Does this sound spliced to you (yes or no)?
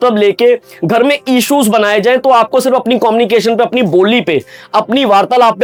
no